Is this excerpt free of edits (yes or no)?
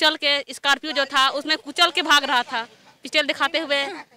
yes